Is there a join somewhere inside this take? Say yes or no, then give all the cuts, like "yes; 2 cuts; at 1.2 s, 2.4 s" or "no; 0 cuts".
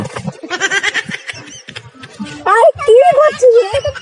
yes; 1 cut; at 1.7 s